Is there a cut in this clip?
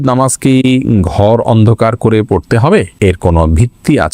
yes; 1 cut; at 2.9 s

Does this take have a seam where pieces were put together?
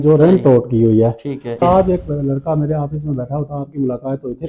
yes; 1 cut; at 1.6 s

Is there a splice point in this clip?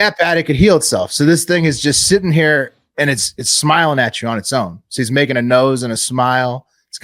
no; 0 cuts

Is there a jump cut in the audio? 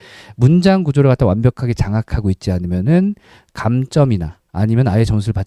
no; 0 cuts

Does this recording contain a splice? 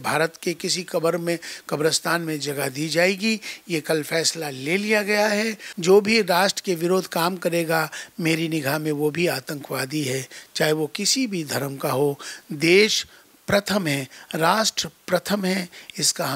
yes; 1 cut; at 5.6 s

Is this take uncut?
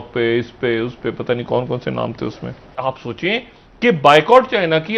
no; 1 cut; at 2.6 s

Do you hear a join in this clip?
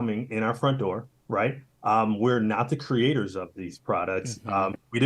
no; 0 cuts

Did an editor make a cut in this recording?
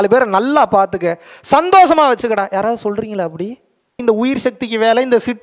yes; 1 cut; at 4.0 s

